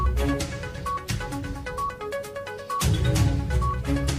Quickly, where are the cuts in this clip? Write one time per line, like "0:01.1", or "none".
none